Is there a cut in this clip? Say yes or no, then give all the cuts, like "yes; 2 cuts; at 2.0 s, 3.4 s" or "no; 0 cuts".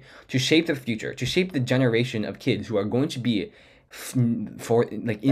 no; 0 cuts